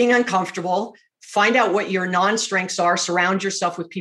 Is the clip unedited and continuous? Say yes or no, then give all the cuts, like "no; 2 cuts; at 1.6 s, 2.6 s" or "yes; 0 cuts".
yes; 0 cuts